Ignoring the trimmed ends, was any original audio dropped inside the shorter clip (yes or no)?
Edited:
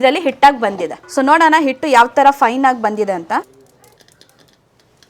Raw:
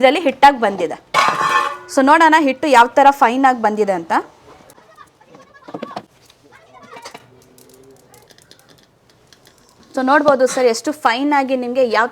yes